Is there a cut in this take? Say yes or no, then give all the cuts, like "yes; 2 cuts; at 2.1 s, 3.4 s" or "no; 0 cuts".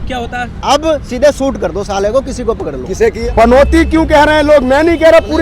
yes; 1 cut; at 3.2 s